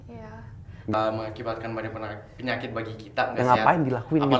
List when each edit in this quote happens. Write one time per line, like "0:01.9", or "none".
0:00.9